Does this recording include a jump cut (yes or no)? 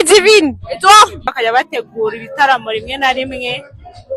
yes